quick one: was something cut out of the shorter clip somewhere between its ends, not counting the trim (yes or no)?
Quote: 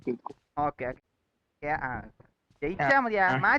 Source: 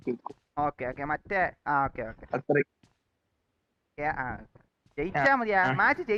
yes